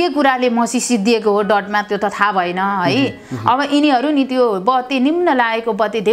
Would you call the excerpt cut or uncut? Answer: uncut